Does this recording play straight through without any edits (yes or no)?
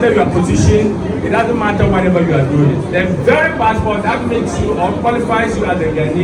yes